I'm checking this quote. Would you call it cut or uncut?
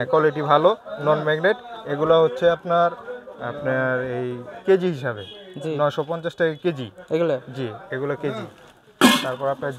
uncut